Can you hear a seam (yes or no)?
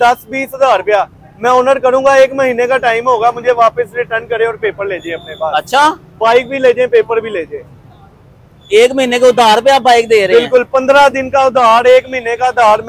no